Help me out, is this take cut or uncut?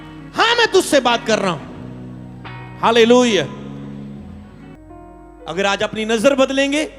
cut